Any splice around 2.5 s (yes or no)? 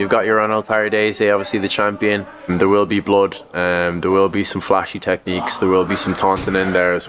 yes